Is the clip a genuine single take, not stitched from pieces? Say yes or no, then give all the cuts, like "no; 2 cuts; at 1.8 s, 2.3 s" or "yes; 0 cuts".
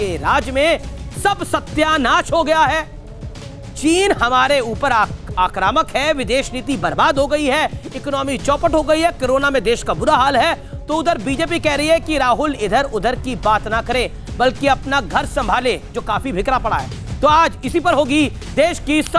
yes; 0 cuts